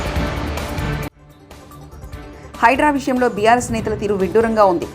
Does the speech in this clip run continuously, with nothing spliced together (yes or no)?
no